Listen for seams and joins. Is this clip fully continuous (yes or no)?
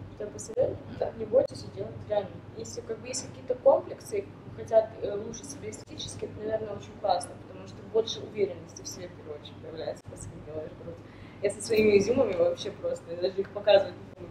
yes